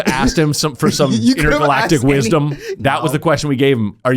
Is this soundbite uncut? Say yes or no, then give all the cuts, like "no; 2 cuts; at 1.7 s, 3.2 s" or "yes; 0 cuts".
no; 1 cut; at 2.7 s